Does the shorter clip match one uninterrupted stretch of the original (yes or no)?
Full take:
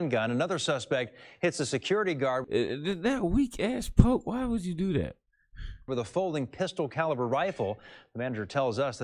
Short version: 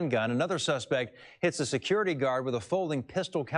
no